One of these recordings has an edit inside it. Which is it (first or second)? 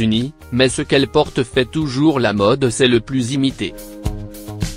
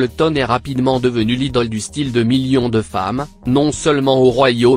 first